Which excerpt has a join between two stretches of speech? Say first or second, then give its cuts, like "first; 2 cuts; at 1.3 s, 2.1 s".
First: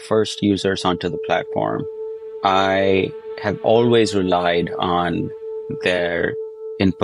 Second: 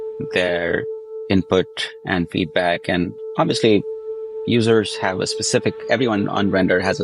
second; 1 cut; at 3.2 s